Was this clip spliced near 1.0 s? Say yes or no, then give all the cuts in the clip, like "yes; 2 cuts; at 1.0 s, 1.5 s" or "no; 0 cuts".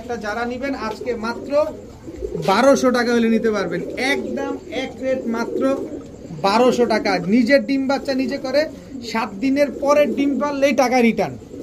no; 0 cuts